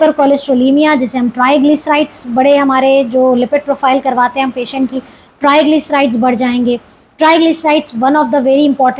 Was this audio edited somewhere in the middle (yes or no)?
no